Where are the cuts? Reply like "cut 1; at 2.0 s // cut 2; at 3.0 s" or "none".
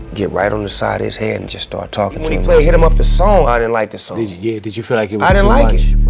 cut 1; at 2.2 s